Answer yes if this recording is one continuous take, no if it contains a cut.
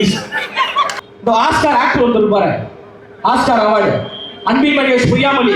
no